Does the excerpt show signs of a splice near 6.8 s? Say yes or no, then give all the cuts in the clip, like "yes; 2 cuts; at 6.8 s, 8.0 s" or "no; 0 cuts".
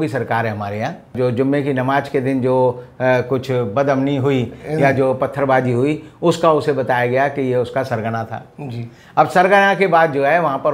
no; 1 cut; at 1.1 s